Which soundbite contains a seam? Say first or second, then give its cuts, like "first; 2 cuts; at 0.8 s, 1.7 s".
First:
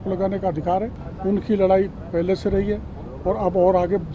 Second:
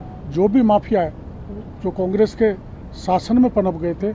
first; 1 cut; at 1.0 s